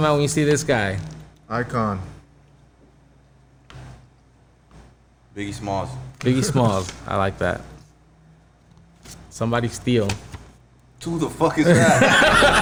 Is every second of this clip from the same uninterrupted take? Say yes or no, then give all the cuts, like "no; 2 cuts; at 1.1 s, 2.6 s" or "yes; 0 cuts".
yes; 0 cuts